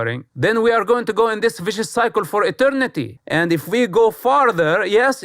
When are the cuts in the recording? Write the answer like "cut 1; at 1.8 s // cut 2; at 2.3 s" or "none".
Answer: cut 1; at 3.2 s